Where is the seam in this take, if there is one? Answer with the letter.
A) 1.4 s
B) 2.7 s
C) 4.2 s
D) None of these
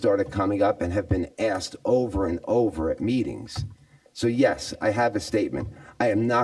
D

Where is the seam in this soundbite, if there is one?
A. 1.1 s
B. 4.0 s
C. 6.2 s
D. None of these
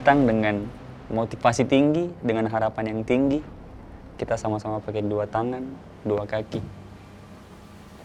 D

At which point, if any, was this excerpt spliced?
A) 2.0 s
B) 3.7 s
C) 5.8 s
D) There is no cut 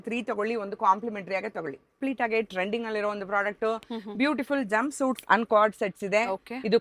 A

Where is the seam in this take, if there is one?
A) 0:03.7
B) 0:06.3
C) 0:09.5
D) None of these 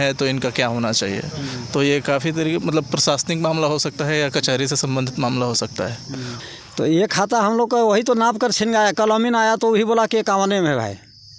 B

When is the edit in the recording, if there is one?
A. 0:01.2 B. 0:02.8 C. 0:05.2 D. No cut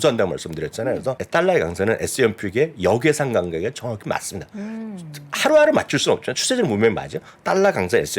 A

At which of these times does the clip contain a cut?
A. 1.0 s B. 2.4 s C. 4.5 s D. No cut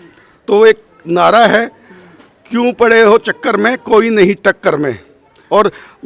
D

